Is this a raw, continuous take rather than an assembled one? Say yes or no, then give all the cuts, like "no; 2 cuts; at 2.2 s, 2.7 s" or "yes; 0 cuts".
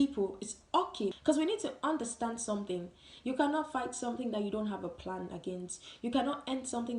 no; 1 cut; at 1.2 s